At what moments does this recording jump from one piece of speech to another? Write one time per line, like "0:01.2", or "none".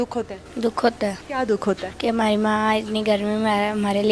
0:01.2
0:01.9